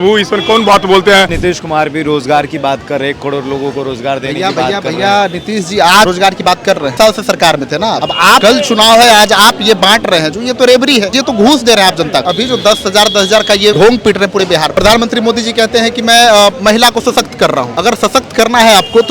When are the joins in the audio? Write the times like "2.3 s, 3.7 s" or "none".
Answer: 1.4 s, 6.5 s, 8.2 s, 11.2 s, 12.3 s, 13.8 s, 14.7 s, 17.7 s